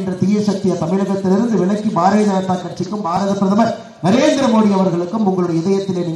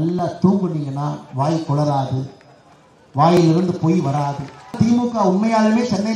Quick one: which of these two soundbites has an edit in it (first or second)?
second